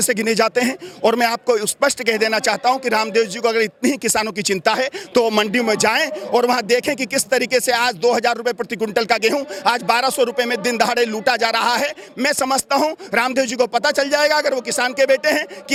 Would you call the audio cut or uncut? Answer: uncut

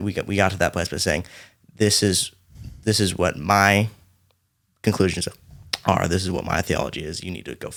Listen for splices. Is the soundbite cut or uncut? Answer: uncut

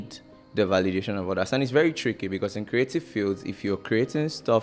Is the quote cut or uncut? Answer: uncut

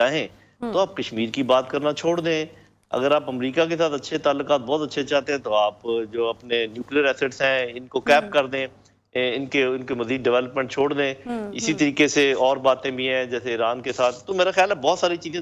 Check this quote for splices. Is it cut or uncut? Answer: uncut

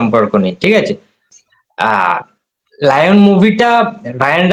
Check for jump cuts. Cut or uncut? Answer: uncut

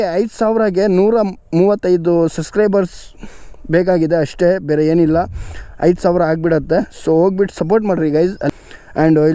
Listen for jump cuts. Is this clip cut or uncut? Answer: cut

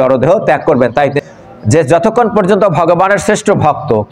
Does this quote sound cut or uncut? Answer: cut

